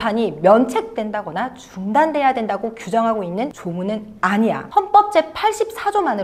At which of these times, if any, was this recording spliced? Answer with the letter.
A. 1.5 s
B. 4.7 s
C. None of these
C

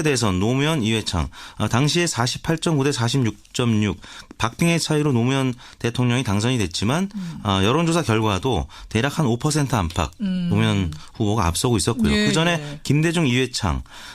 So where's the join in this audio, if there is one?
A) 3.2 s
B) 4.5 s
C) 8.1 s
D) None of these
B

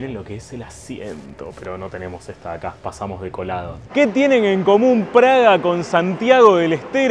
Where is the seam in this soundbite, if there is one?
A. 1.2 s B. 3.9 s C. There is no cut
B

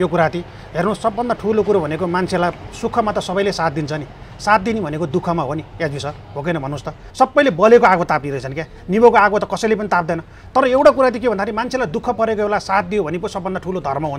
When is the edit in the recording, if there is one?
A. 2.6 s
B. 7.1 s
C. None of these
B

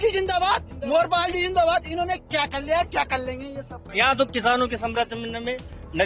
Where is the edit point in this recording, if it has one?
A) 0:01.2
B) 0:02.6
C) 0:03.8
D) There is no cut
C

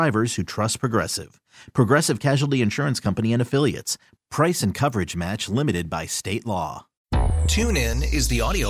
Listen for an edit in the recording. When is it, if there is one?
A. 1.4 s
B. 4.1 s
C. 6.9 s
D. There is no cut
C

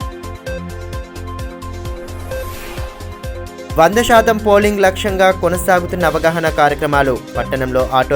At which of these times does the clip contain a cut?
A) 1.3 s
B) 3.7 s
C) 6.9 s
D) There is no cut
A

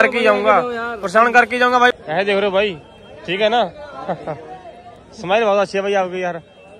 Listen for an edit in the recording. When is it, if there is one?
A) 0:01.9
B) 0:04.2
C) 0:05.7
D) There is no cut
A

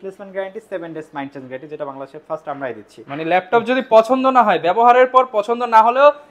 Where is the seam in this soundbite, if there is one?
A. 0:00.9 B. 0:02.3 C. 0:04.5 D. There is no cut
D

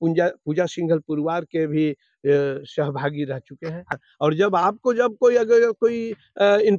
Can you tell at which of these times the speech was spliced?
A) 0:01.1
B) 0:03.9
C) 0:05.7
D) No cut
B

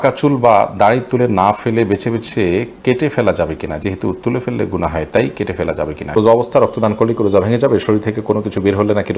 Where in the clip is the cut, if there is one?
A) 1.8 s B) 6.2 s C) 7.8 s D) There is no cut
B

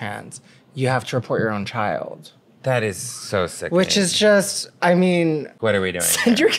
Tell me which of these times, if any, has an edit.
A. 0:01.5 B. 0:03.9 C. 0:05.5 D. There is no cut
C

